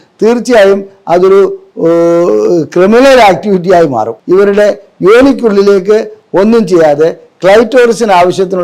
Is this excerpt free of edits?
no; 1 cut; at 4.1 s

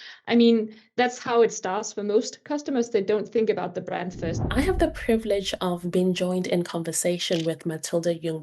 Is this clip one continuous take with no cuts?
no; 1 cut; at 4.3 s

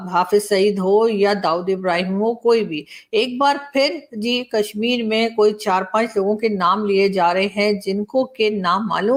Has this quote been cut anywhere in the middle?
no; 0 cuts

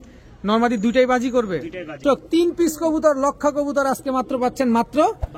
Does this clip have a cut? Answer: yes; 1 cut; at 2.0 s

